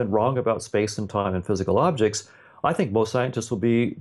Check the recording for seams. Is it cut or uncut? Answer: uncut